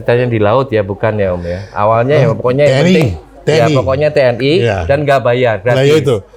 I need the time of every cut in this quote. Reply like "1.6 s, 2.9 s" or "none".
none